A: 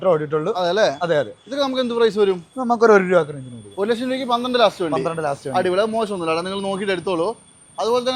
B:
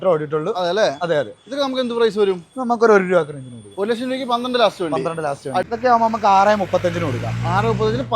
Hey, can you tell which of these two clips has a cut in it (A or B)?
B